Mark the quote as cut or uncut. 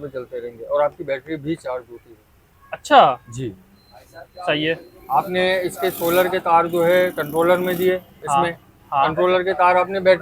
uncut